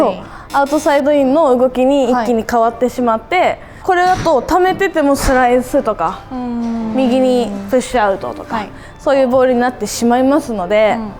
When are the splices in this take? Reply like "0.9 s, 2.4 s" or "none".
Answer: none